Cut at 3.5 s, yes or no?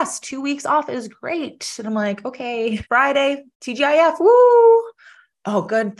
yes